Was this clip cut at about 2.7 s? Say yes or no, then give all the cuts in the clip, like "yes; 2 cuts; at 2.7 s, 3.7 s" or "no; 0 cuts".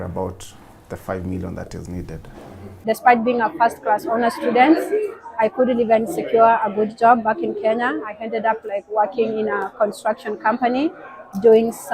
yes; 1 cut; at 2.7 s